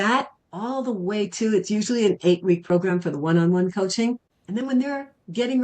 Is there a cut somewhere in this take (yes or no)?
yes